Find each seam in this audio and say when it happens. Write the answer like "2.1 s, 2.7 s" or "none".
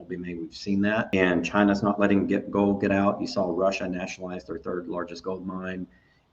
1.1 s